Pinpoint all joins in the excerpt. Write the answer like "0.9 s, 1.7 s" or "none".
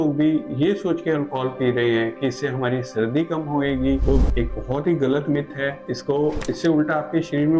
none

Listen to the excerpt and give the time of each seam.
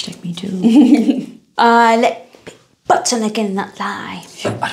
1.4 s

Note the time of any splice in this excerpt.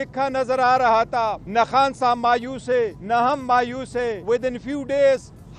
1.4 s, 3.0 s, 4.2 s

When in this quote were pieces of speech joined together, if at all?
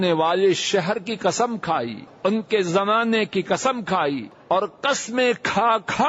2.0 s, 4.3 s

